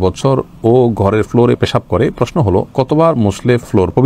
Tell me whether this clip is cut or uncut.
uncut